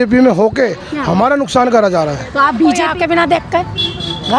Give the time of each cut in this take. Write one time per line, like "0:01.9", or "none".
0:02.8